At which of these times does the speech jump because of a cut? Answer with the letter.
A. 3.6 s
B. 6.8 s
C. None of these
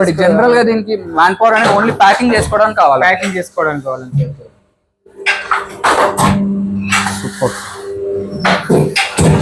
C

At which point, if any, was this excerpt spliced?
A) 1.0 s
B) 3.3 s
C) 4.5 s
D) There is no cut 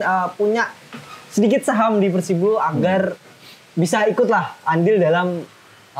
D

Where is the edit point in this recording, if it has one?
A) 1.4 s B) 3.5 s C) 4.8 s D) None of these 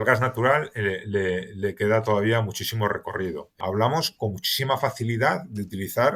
B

